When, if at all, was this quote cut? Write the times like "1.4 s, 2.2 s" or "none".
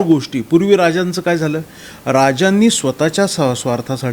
none